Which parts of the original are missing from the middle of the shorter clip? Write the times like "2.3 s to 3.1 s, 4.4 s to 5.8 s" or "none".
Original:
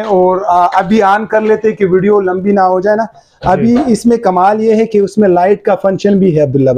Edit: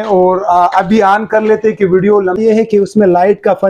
2.4 s to 4.6 s